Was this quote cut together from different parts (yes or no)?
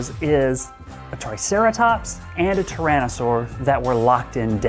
no